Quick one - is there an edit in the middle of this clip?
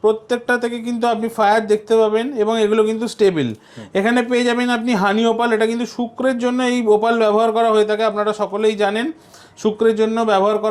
no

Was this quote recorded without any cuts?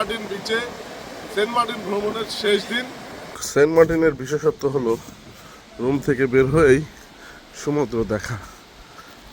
no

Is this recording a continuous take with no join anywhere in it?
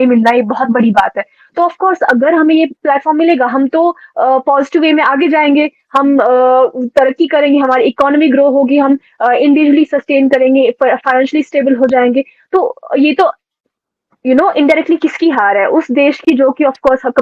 yes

